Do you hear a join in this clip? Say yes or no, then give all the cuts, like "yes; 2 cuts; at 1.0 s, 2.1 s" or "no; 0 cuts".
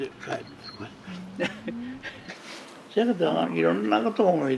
yes; 2 cuts; at 2.2 s, 3.4 s